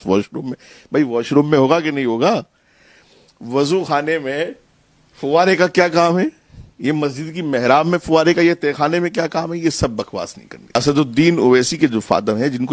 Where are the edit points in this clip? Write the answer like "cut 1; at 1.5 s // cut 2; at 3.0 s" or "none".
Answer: cut 1; at 10.8 s